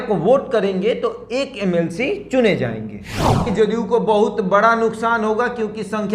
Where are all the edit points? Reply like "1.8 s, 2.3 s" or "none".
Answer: 3.5 s